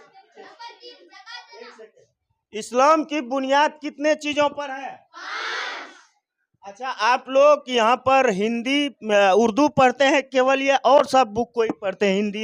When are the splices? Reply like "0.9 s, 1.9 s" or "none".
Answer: none